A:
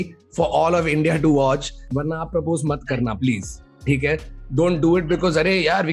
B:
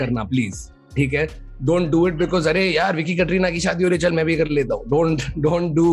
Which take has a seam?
A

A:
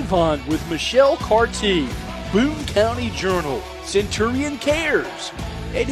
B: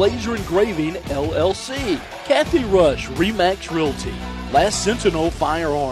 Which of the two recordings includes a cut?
B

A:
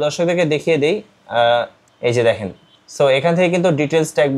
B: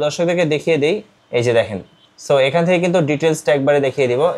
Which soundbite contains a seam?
B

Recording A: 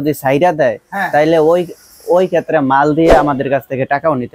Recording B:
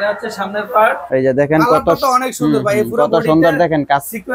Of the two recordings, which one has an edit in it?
B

